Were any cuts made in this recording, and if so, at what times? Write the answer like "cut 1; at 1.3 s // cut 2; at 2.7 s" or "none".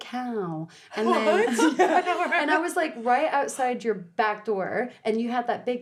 none